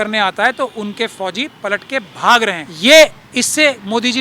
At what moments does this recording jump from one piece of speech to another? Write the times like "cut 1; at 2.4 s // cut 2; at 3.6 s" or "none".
cut 1; at 2.7 s